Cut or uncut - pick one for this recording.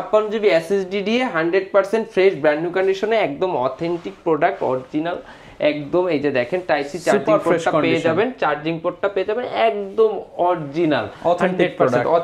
uncut